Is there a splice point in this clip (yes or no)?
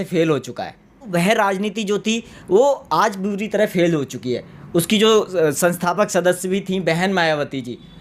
yes